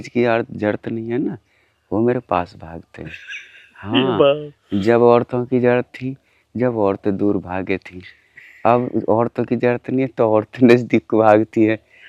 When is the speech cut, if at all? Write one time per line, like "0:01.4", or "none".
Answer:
none

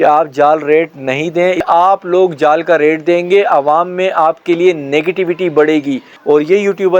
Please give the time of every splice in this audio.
0:01.6
0:06.1

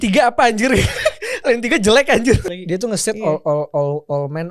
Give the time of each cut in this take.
0:02.4

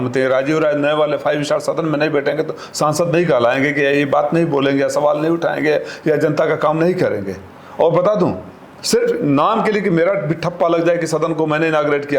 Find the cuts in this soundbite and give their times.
none

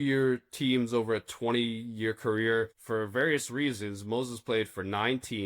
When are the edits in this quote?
0:02.8

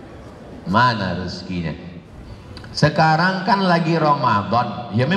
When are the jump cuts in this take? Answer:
0:02.1

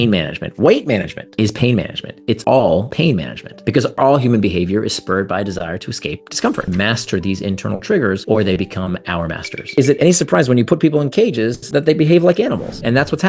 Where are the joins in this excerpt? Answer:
0:03.9
0:06.7
0:09.7

